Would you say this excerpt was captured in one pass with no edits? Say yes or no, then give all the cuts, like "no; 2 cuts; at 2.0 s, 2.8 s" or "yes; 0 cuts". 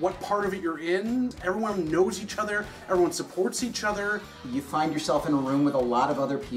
no; 2 cuts; at 1.3 s, 4.4 s